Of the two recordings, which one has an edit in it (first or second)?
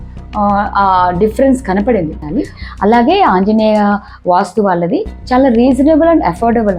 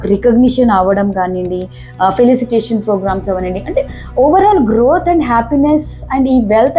first